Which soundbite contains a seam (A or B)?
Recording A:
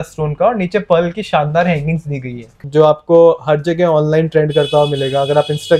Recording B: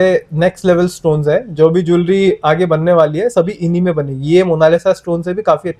A